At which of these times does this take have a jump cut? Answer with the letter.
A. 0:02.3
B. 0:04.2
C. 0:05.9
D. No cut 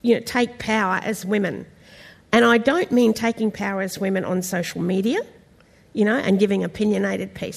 D